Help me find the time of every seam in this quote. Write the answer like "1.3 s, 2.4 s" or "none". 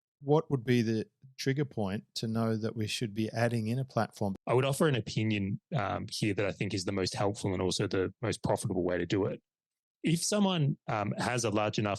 4.4 s